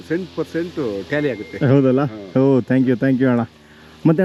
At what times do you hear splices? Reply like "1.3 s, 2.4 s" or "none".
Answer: none

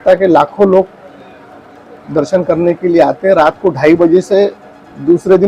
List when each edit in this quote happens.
none

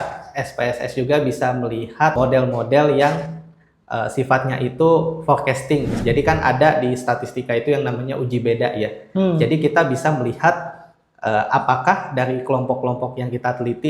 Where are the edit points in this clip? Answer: 2.1 s, 5.9 s

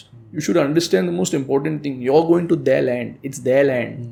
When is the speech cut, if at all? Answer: none

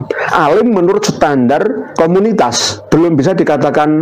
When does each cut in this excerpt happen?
1.8 s, 2.7 s

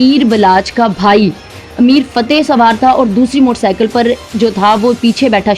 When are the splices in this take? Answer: none

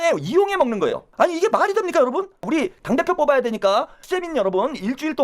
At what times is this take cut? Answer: 1.0 s, 2.4 s, 4.0 s

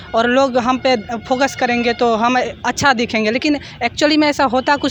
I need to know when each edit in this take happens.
none

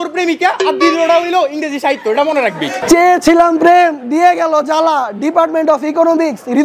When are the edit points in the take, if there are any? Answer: 2.8 s

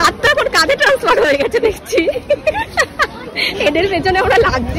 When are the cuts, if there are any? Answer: none

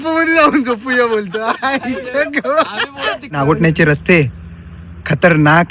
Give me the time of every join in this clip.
3.3 s

